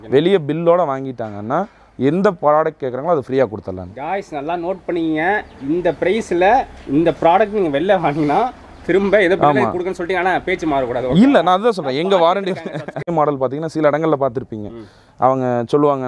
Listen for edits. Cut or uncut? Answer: cut